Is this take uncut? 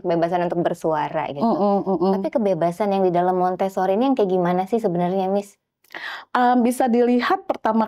yes; 0 cuts

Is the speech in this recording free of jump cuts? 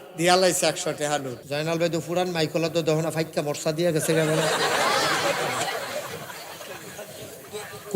no; 1 cut; at 1.4 s

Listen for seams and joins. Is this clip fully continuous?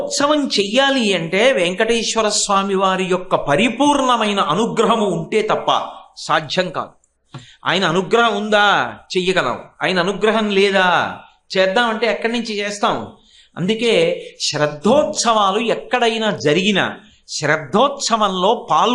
yes; 0 cuts

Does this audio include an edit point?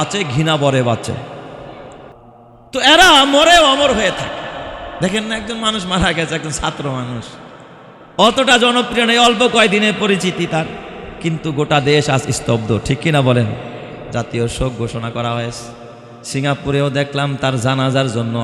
yes; 1 cut; at 2.1 s

